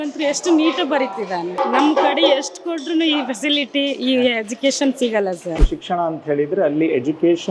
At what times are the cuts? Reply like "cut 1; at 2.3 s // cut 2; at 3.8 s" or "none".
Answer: cut 1; at 1.6 s // cut 2; at 5.6 s